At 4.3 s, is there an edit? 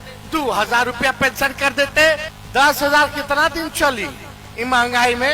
no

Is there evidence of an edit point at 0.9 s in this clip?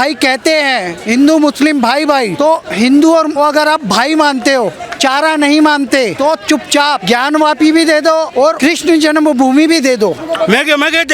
no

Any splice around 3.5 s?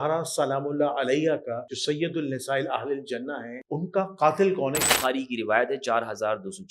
yes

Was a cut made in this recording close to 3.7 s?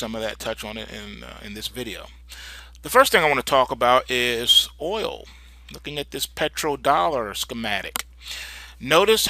no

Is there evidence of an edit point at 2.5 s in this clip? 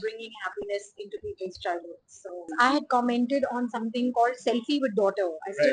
yes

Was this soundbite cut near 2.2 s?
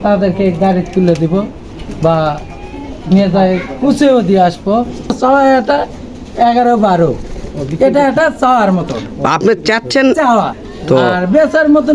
no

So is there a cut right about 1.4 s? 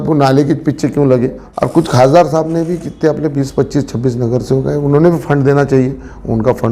yes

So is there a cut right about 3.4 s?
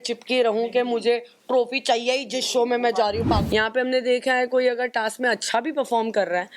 yes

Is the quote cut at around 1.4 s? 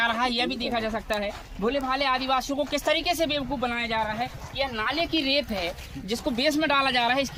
no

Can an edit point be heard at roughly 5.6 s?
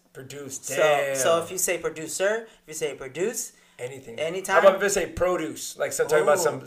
no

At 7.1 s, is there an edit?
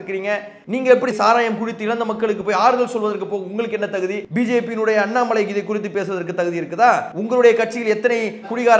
yes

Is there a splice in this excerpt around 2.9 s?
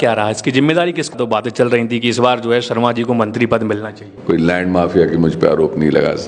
no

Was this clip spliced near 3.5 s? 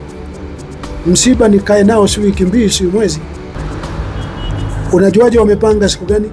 yes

